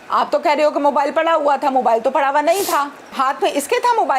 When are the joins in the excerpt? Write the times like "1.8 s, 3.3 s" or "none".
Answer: 3.1 s